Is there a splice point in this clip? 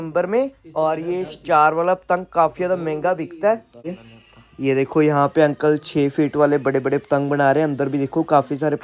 yes; 1 cut; at 3.9 s

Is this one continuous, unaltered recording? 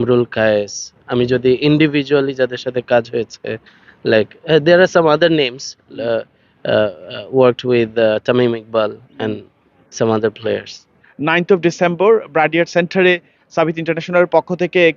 no; 1 cut; at 11.1 s

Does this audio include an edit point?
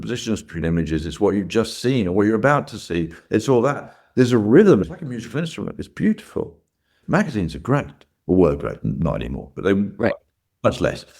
yes; 2 cuts; at 4.8 s, 7.0 s

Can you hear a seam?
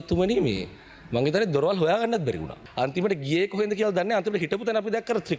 yes; 1 cut; at 2.6 s

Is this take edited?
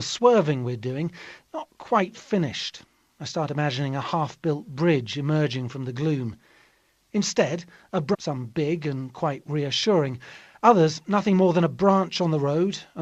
no; 0 cuts

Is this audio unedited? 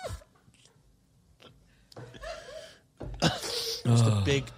no; 1 cut; at 3.7 s

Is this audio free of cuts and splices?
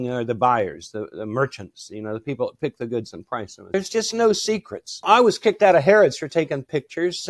no; 2 cuts; at 3.7 s, 5.0 s

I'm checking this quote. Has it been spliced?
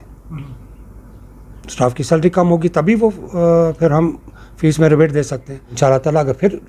yes; 1 cut; at 5.8 s

